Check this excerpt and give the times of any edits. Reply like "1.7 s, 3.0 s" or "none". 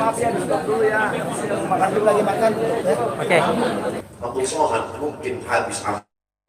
4.0 s